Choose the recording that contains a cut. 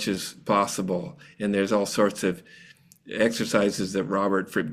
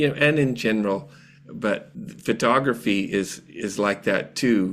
second; 1 cut; at 1.9 s

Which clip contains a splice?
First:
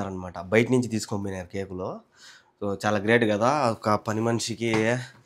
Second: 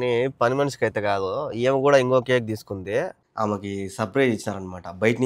second; 1 cut; at 3.2 s

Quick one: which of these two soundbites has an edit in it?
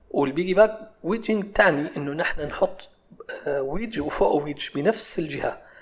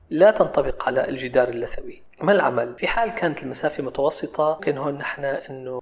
second; 1 cut; at 2.7 s

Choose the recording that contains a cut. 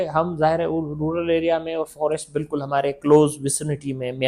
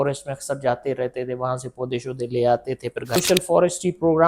second; 1 cut; at 3.2 s

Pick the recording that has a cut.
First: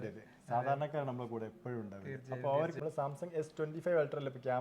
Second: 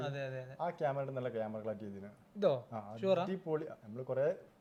first; 1 cut; at 2.8 s

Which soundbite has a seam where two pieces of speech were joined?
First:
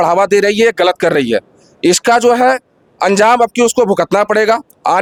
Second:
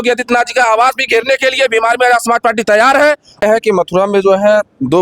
second; 1 cut; at 3.4 s

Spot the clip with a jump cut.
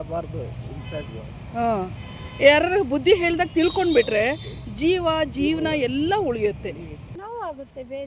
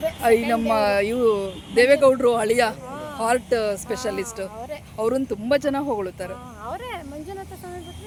first; 1 cut; at 7.1 s

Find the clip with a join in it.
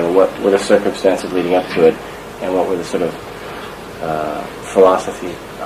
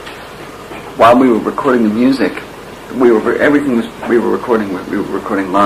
second; 1 cut; at 1.9 s

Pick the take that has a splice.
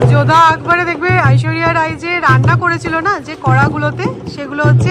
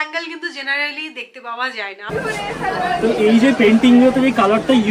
second; 1 cut; at 2.1 s

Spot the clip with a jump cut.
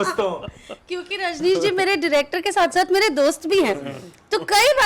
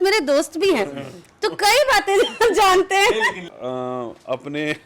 second; 1 cut; at 3.5 s

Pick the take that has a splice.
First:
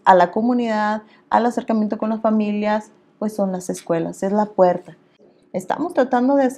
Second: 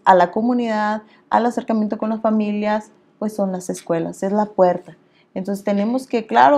first; 1 cut; at 5.3 s

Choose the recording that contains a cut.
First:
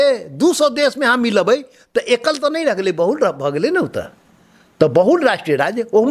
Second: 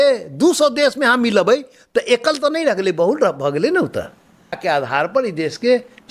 second; 1 cut; at 4.6 s

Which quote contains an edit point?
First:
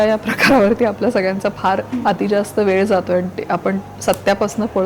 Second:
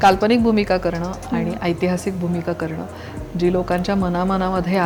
first; 2 cuts; at 1.9 s, 3.9 s

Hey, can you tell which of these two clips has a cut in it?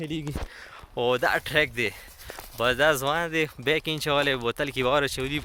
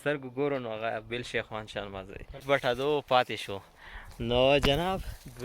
second; 1 cut; at 2.4 s

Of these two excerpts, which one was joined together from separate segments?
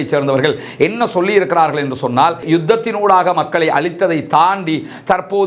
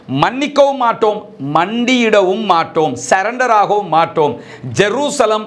first; 1 cut; at 2.4 s

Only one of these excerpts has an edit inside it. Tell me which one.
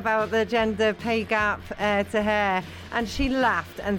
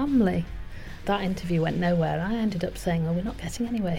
second; 1 cut; at 1.0 s

